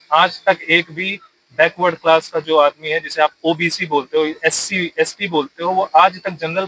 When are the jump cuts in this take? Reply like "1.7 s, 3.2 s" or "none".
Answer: none